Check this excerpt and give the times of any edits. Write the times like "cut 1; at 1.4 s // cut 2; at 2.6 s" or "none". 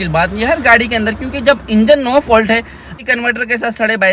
cut 1; at 2.9 s